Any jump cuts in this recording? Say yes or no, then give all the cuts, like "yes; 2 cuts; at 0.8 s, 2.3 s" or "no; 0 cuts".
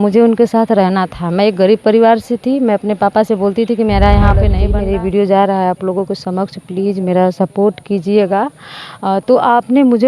yes; 1 cut; at 4.6 s